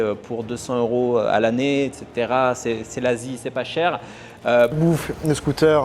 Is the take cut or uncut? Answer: cut